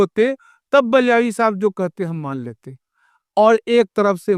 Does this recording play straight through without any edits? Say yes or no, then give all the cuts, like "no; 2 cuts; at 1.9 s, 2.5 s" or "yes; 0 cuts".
yes; 0 cuts